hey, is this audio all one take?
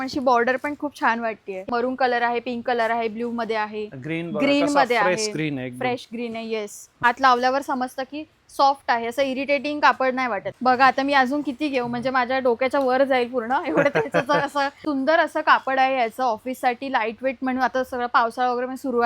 no; 4 cuts; at 1.7 s, 7.0 s, 10.5 s, 14.8 s

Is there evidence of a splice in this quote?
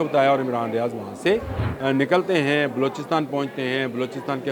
yes; 1 cut; at 1.6 s

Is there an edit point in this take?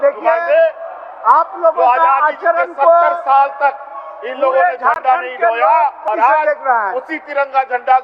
yes; 1 cut; at 6.0 s

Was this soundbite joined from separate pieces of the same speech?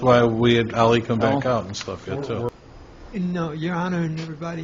yes; 1 cut; at 2.5 s

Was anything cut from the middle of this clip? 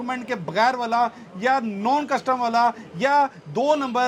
no; 0 cuts

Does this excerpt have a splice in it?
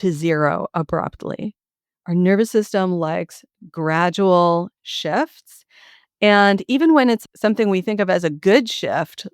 yes; 1 cut; at 7.2 s

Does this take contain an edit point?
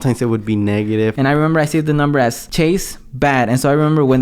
yes; 2 cuts; at 1.1 s, 2.4 s

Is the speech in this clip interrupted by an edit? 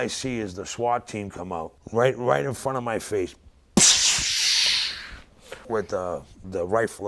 yes; 2 cuts; at 1.8 s, 5.6 s

